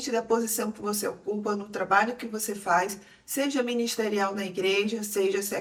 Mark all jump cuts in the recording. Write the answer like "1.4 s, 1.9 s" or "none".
none